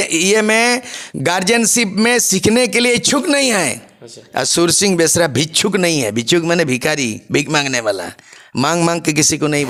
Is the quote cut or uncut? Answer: uncut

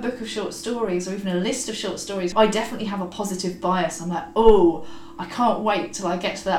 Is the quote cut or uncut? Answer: cut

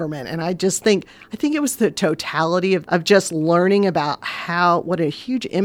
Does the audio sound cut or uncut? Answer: cut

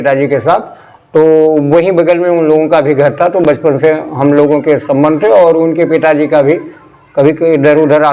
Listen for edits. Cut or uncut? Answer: uncut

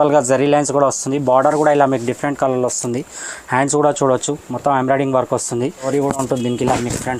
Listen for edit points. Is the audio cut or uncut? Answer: cut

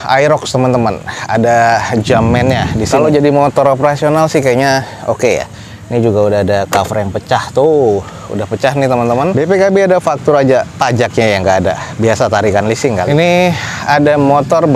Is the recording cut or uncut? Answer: cut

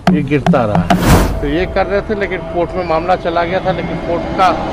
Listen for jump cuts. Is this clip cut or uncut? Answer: cut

